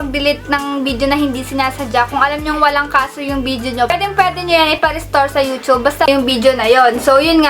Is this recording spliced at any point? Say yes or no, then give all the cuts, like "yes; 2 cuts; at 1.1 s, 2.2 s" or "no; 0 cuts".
yes; 1 cut; at 6.1 s